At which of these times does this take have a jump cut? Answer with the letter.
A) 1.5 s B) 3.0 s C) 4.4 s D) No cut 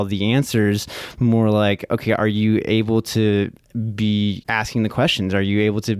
C